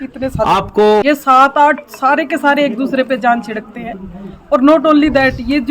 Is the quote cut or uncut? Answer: cut